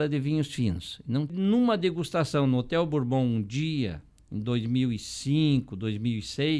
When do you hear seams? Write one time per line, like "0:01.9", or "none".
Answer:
0:01.3